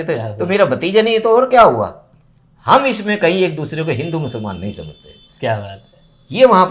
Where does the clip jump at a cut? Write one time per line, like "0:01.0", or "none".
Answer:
none